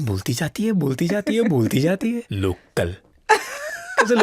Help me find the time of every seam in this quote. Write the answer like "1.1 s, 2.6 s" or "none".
2.3 s